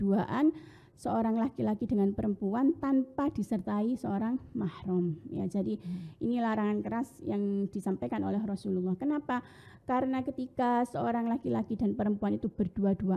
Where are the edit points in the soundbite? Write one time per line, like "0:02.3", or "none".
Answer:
none